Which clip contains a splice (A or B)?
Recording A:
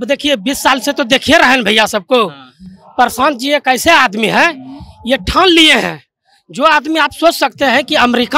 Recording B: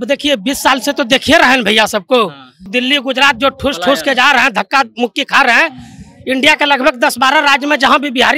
B